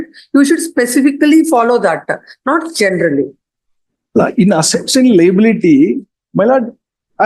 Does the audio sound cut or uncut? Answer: uncut